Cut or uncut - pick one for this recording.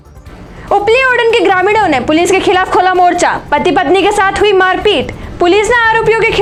uncut